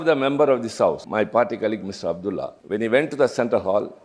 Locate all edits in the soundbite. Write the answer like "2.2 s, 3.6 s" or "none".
1.0 s, 2.5 s